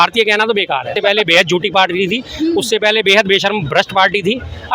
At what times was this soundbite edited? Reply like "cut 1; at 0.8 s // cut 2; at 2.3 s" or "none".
cut 1; at 0.9 s